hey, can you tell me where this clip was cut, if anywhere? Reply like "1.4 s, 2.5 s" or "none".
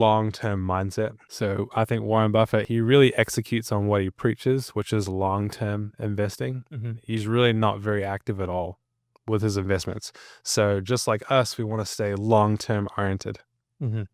1.2 s, 2.7 s